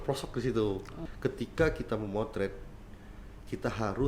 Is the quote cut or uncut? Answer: cut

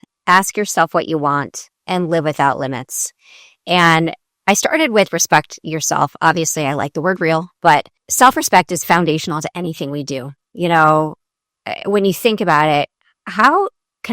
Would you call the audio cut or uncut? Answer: cut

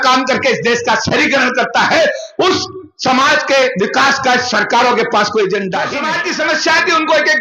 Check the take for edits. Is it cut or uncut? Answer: cut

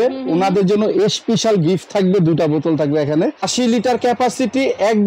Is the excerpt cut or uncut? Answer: cut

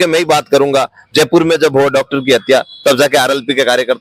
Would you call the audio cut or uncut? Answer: uncut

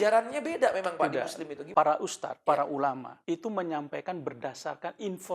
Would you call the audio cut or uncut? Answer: cut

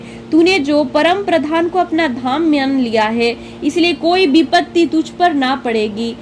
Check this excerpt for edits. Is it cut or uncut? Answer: uncut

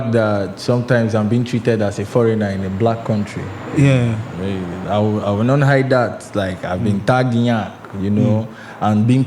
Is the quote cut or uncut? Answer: uncut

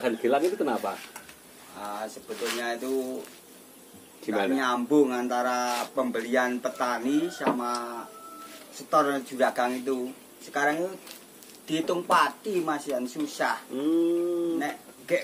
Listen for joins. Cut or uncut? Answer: uncut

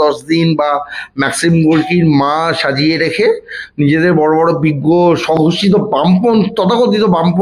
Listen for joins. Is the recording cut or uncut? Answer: uncut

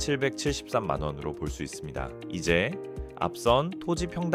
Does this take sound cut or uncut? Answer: uncut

